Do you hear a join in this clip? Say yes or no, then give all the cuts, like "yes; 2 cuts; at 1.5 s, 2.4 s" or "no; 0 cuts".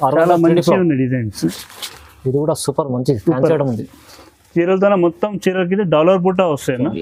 no; 0 cuts